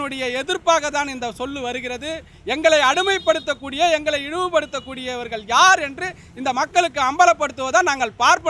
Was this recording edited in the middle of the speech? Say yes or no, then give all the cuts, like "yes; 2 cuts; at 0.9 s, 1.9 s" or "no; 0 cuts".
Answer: no; 0 cuts